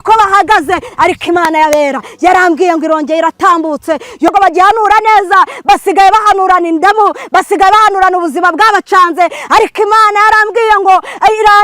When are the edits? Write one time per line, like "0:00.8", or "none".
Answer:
0:04.3